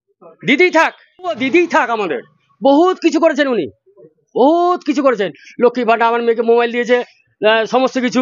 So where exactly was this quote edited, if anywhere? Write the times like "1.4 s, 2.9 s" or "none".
1.4 s